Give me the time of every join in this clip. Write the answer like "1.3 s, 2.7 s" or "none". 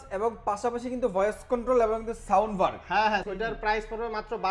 3.2 s